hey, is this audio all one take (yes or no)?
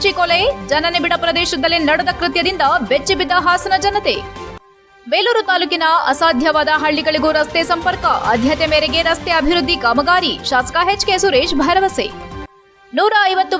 yes